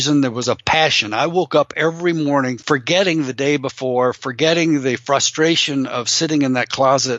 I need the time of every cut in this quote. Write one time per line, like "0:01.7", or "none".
0:02.6